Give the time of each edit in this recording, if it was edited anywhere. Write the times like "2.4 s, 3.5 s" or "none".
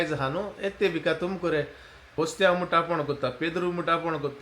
2.1 s